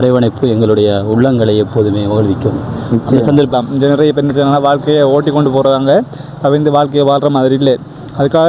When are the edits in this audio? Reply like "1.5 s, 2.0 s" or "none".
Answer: 3.5 s